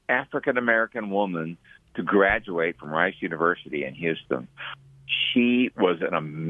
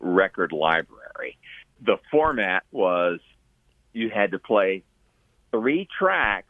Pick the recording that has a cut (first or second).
second